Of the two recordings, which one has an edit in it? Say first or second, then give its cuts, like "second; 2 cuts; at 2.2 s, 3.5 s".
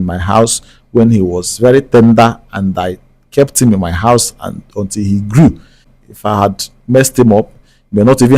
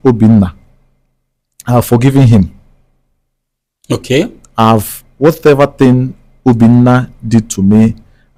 first; 1 cut; at 5.9 s